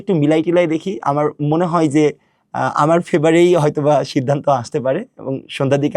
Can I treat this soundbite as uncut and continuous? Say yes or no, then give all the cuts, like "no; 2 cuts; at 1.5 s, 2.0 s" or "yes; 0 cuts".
yes; 0 cuts